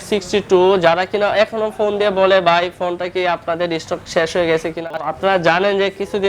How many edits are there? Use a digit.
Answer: 1